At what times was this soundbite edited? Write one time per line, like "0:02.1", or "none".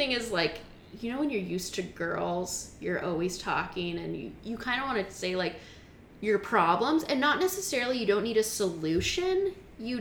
none